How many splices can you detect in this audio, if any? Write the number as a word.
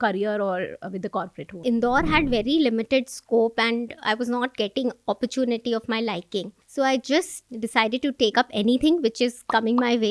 three